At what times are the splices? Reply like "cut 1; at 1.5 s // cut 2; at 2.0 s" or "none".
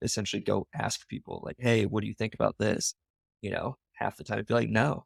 none